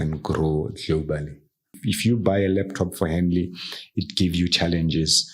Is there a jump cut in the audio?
yes; 1 cut; at 1.7 s

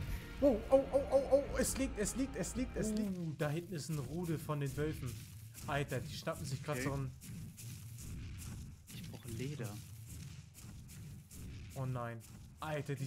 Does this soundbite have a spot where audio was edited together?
yes; 1 cut; at 2.7 s

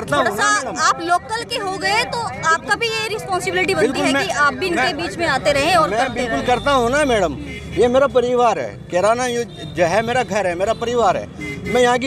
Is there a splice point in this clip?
no; 0 cuts

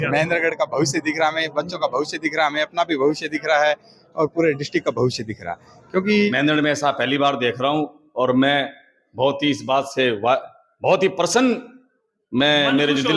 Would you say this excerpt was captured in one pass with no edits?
no; 1 cut; at 6.3 s

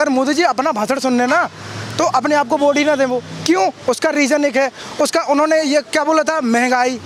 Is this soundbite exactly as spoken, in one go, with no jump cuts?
yes; 0 cuts

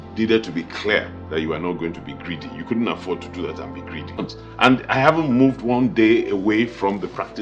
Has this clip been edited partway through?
yes; 1 cut; at 4.2 s

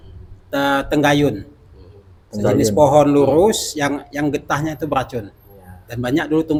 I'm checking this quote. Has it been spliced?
no; 0 cuts

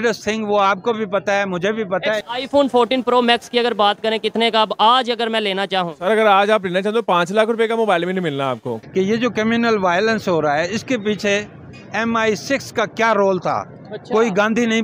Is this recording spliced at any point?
yes; 2 cuts; at 2.2 s, 8.7 s

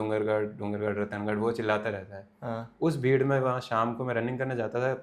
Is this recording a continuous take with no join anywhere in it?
yes; 0 cuts

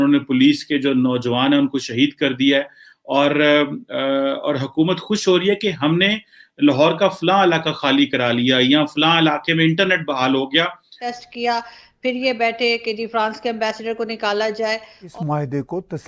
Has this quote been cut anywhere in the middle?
yes; 2 cuts; at 11.1 s, 15.0 s

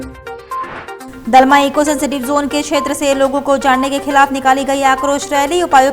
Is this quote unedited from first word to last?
no; 1 cut; at 1.1 s

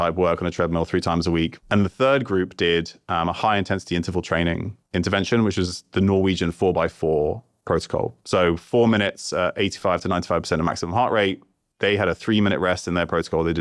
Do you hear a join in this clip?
yes; 1 cut; at 1.6 s

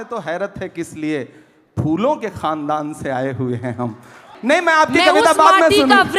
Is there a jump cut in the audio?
yes; 1 cut; at 4.3 s

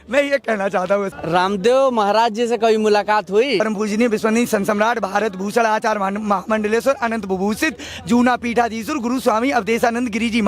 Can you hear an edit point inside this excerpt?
yes; 2 cuts; at 1.2 s, 3.6 s

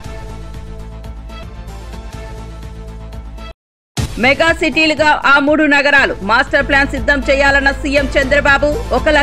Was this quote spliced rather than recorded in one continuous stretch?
yes; 2 cuts; at 1.4 s, 3.5 s

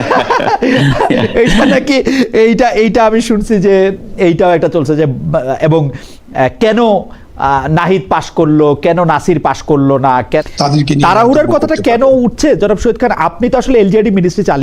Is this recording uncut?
no; 1 cut; at 10.4 s

